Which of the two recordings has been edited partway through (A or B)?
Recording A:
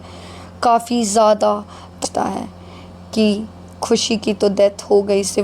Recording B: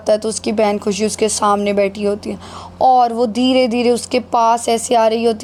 A